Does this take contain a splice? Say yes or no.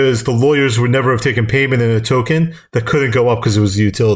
no